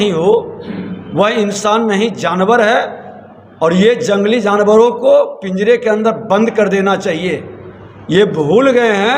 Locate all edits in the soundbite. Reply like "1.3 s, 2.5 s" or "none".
none